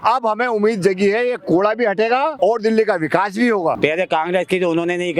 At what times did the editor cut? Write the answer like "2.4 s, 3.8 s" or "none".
2.3 s, 3.8 s